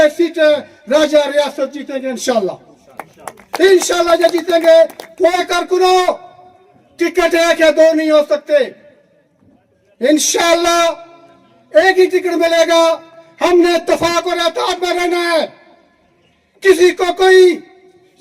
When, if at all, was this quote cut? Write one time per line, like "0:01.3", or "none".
0:05.4

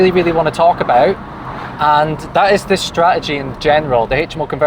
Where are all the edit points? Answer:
none

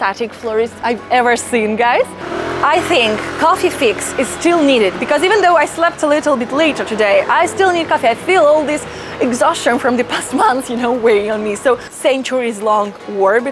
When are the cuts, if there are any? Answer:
0:02.3
0:11.9

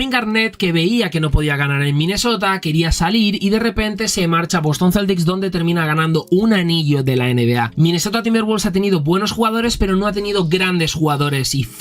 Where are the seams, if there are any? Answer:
0:07.7

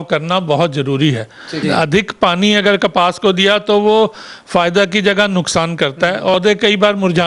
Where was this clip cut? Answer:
0:01.5
0:06.4

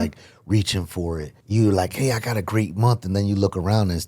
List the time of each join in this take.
0:01.3

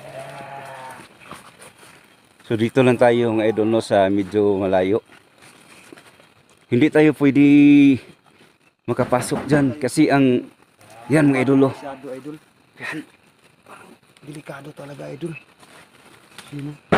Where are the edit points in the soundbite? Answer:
none

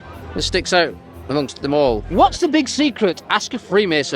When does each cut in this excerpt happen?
0:02.0

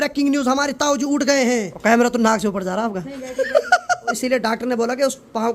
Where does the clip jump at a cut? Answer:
0:01.7
0:04.2

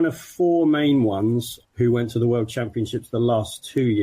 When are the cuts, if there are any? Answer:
0:01.6

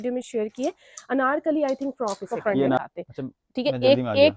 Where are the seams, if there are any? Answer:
0:02.8

